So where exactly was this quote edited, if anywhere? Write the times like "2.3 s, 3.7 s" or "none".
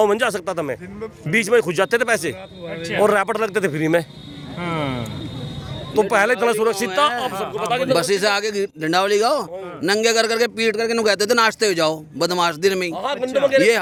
none